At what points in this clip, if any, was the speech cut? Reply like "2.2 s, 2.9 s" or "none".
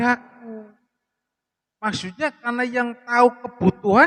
none